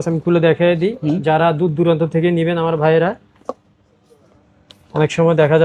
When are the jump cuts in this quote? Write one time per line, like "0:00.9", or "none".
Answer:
none